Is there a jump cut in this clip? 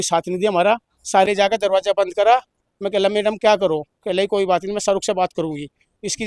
yes; 1 cut; at 1.2 s

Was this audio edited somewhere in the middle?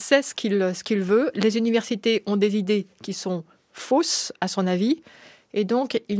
no; 0 cuts

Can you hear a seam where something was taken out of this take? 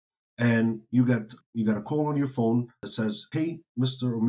yes; 2 cuts; at 1.4 s, 2.9 s

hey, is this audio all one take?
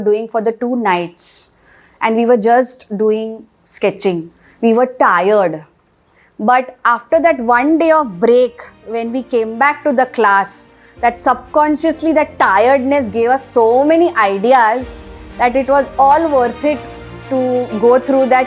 yes; 0 cuts

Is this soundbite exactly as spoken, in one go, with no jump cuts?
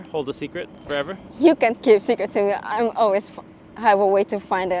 yes; 0 cuts

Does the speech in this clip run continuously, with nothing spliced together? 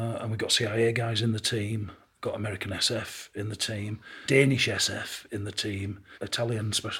no; 2 cuts; at 4.2 s, 6.0 s

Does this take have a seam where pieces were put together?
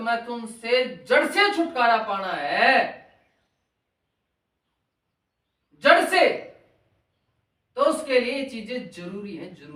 no; 0 cuts

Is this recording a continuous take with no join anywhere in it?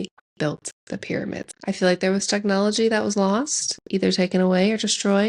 no; 1 cut; at 1.5 s

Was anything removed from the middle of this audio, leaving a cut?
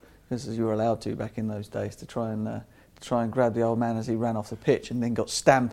no; 0 cuts

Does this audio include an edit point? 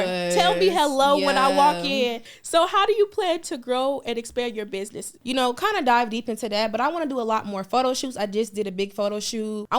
yes; 2 cuts; at 2.2 s, 5.2 s

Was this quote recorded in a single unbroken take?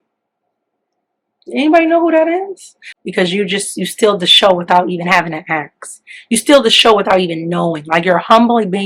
no; 1 cut; at 2.9 s

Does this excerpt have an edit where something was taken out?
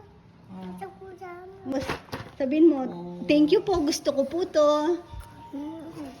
yes; 1 cut; at 1.7 s

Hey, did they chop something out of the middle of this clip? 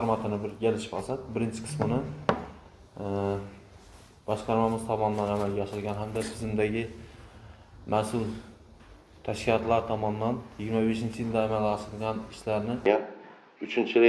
yes; 1 cut; at 12.9 s

